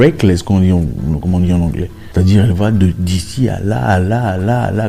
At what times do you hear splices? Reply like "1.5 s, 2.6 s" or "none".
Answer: 1.9 s